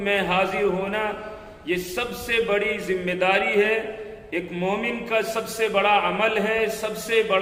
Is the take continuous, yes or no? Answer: yes